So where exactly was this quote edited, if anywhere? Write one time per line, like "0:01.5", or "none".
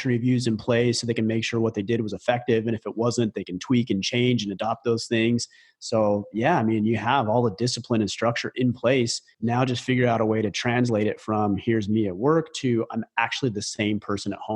0:09.2